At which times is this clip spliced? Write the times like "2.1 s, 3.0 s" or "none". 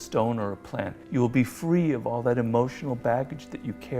1.0 s